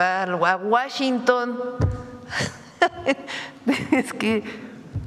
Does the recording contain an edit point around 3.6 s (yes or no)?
no